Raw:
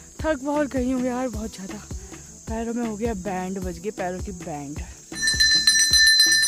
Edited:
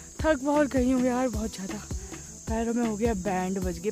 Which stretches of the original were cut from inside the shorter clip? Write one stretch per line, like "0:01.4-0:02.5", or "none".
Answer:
none